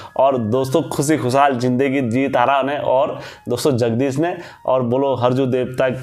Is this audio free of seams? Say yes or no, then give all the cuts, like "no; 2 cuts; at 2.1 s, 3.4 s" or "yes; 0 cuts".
yes; 0 cuts